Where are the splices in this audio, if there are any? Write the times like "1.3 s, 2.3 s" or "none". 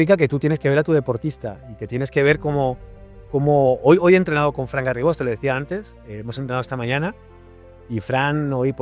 none